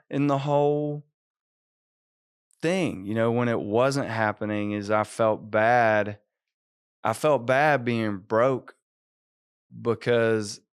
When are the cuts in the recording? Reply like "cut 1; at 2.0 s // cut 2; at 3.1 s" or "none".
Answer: none

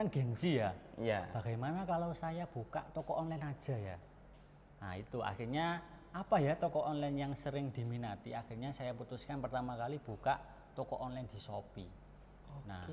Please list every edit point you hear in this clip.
none

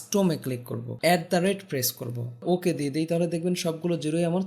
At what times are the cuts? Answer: cut 1; at 0.9 s // cut 2; at 2.4 s

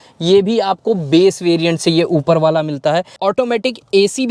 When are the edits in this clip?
cut 1; at 3.2 s

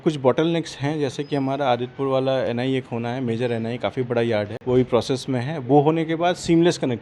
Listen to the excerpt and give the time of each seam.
cut 1; at 4.6 s

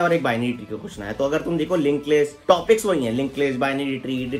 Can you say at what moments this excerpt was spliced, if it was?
cut 1; at 2.4 s

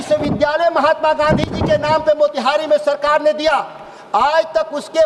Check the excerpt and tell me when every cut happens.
none

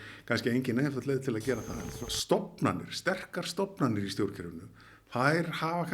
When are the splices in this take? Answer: cut 1; at 1.8 s

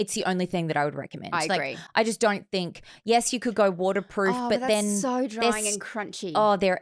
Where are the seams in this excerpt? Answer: none

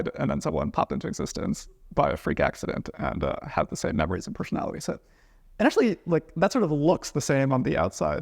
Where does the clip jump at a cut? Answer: none

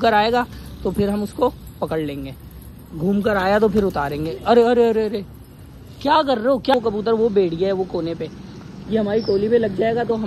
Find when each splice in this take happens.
cut 1; at 6.7 s

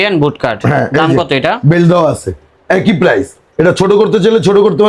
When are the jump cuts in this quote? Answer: none

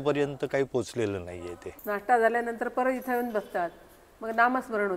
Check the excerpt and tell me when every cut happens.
cut 1; at 1.7 s

